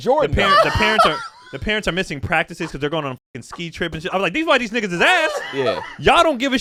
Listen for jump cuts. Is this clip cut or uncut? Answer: uncut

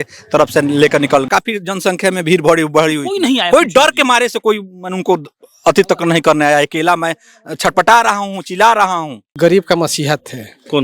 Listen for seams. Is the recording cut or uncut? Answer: cut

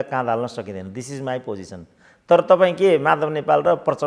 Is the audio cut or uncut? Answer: uncut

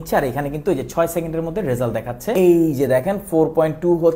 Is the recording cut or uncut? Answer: cut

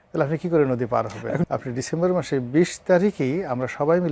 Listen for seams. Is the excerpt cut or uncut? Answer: cut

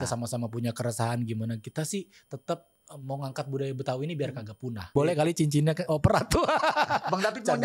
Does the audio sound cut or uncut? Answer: cut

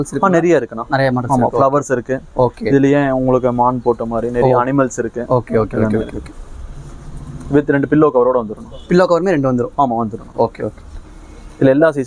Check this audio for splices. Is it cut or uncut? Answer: uncut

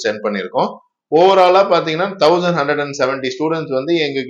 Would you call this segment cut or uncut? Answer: uncut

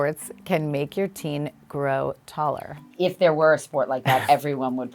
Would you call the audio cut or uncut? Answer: cut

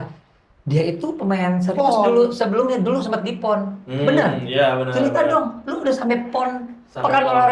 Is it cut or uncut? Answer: uncut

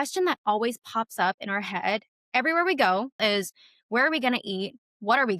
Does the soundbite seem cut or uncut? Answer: cut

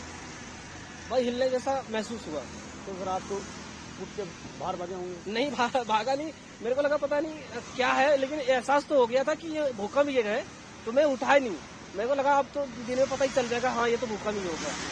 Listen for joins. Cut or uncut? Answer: uncut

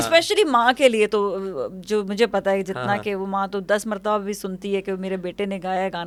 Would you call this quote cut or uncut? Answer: uncut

